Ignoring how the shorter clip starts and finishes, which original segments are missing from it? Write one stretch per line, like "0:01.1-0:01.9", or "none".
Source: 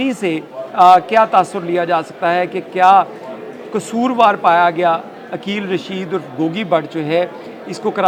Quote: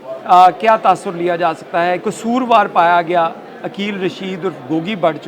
0:02.6-0:03.8